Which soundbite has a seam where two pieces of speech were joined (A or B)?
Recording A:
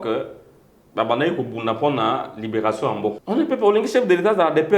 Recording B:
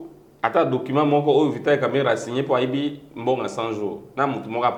A